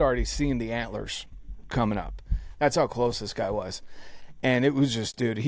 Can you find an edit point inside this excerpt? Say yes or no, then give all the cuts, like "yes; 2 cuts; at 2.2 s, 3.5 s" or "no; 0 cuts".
no; 0 cuts